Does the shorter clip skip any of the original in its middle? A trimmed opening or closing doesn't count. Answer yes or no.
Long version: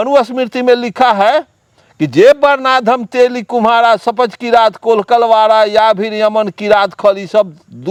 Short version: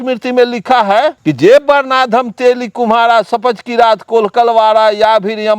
yes